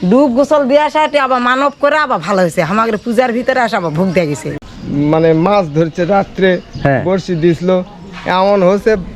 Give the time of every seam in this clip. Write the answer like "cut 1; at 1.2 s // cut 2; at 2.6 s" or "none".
cut 1; at 4.5 s